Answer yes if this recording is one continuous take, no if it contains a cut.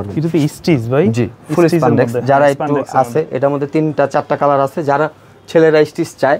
yes